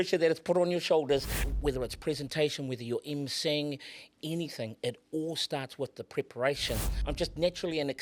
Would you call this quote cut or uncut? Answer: cut